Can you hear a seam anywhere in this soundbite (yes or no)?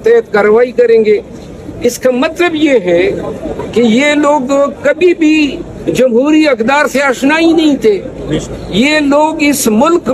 no